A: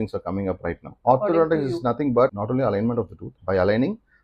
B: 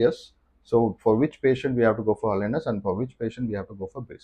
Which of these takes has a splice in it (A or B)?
A